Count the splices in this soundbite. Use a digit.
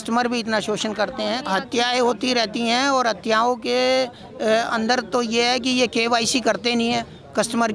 1